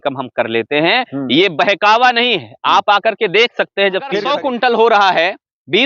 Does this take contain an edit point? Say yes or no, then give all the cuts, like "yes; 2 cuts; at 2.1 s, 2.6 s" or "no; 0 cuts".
yes; 1 cut; at 4.3 s